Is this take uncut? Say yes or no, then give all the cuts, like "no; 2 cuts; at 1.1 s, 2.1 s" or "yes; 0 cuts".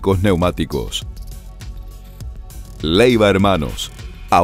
yes; 0 cuts